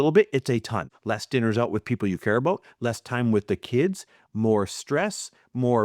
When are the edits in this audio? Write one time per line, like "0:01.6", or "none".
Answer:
0:00.9